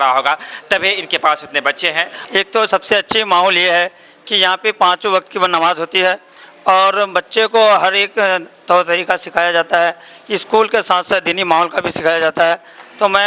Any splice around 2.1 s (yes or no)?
yes